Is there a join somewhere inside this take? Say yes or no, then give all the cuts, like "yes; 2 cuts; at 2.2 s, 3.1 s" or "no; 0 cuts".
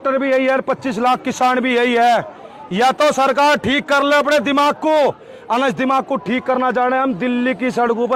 no; 0 cuts